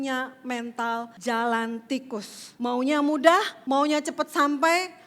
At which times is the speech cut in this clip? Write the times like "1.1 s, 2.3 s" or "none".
1.1 s, 2.4 s, 3.5 s